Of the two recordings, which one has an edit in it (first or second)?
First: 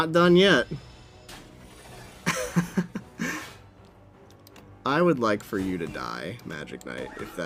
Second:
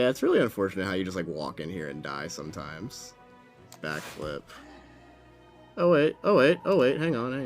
second